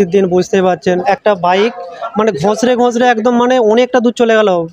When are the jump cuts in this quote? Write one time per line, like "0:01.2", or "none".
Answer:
0:01.0